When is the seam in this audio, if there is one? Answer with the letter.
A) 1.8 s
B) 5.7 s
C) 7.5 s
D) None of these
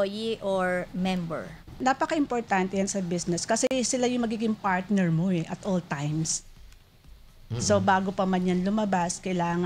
A